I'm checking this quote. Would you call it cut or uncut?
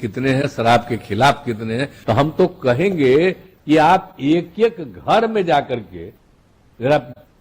cut